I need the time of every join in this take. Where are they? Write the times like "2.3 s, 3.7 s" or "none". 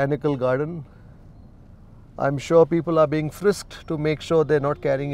none